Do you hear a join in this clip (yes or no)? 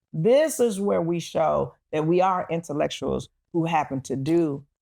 no